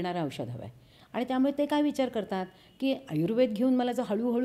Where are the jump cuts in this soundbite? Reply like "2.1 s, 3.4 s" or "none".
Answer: none